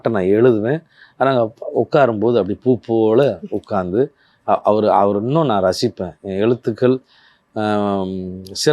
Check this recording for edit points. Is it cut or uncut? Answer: uncut